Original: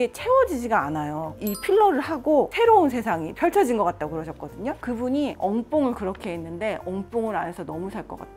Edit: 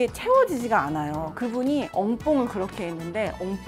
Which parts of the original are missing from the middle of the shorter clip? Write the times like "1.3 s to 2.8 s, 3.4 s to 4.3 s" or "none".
1.3 s to 4.8 s